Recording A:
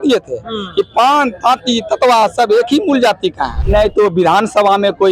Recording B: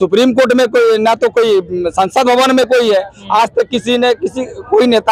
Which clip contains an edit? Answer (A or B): A